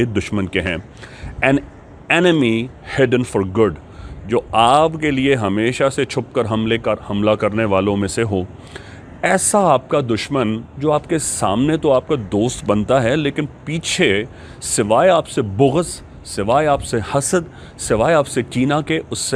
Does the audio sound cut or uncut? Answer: uncut